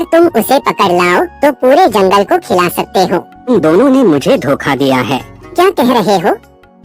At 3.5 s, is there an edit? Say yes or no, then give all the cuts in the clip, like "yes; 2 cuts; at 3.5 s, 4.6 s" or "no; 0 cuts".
yes; 2 cuts; at 3.5 s, 5.5 s